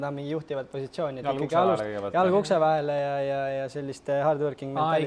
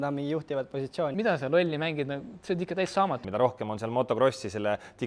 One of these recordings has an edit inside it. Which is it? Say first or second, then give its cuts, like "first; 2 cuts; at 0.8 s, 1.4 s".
second; 2 cuts; at 1.1 s, 3.2 s